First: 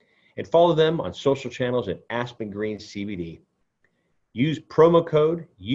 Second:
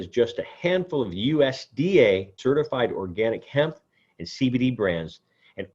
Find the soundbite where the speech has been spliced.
second; 1 cut; at 2.4 s

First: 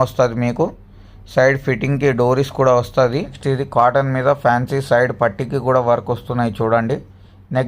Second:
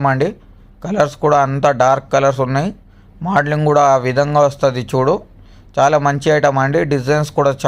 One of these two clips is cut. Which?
first; 1 cut; at 3.4 s

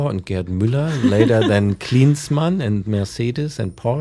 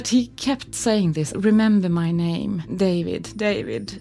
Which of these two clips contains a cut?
second; 2 cuts; at 1.3 s, 2.7 s

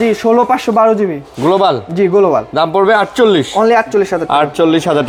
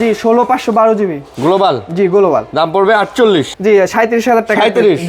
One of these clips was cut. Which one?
second; 1 cut; at 3.5 s

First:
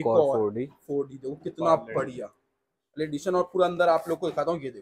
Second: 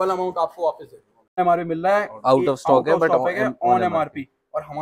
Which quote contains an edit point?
second; 1 cut; at 1.4 s

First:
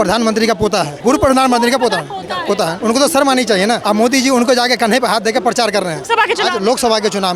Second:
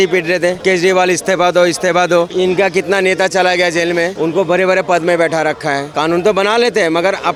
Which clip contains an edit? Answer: first; 4 cuts; at 0.9 s, 2.8 s, 3.8 s, 6.0 s

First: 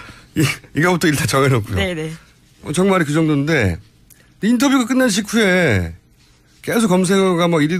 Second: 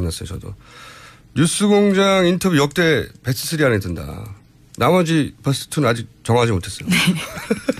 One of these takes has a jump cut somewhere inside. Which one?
second; 1 cut; at 6.9 s

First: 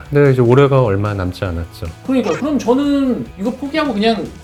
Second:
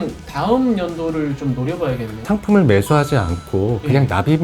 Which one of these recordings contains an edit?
second; 1 cut; at 2.1 s

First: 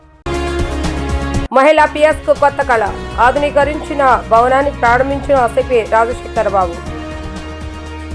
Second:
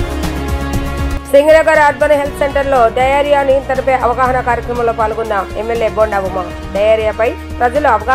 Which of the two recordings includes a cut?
first; 1 cut; at 1.4 s

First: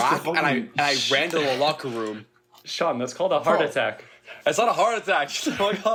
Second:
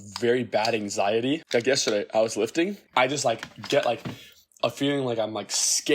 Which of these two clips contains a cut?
second; 2 cuts; at 1.4 s, 2.8 s

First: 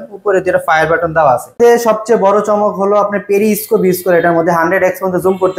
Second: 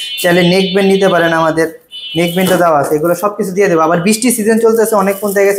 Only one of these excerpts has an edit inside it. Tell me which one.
first; 1 cut; at 1.5 s

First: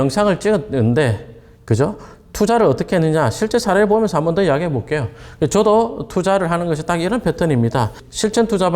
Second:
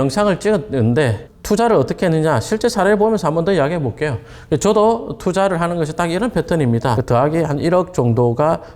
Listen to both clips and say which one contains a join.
second; 2 cuts; at 1.3 s, 7.0 s

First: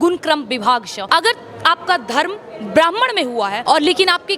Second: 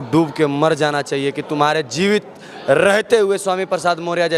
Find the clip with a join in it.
first; 2 cuts; at 0.9 s, 3.6 s

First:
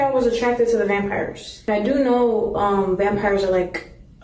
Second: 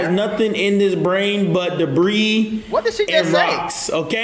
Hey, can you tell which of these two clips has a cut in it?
first; 2 cuts; at 1.6 s, 3.3 s

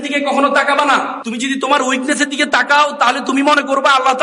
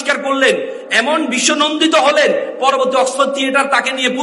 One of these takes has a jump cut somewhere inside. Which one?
first; 1 cut; at 1.2 s

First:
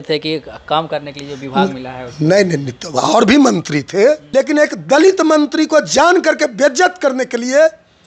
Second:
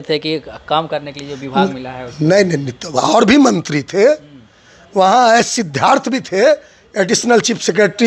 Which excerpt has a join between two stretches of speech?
first; 1 cut; at 4.2 s

